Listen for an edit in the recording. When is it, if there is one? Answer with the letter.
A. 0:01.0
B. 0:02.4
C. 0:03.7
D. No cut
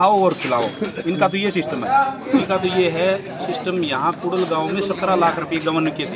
B